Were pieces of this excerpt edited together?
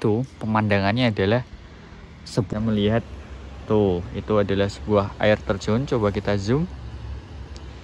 yes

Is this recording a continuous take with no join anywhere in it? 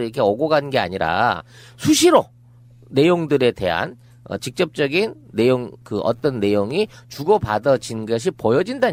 yes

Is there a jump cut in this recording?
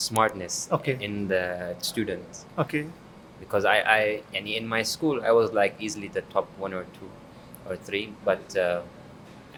no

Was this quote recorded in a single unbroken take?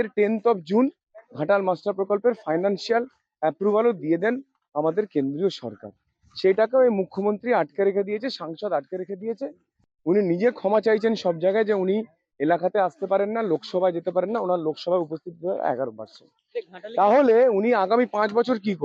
yes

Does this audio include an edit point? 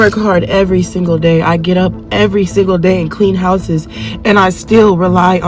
no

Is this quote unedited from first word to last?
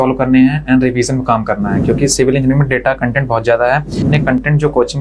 no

